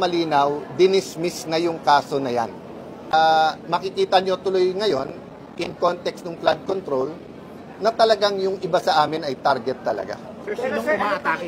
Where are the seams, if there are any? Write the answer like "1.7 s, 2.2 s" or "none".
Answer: 3.1 s